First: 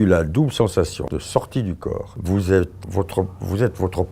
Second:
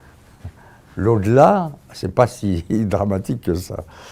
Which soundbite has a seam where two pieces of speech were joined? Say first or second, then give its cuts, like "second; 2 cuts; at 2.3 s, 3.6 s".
first; 3 cuts; at 1.1 s, 2.1 s, 2.8 s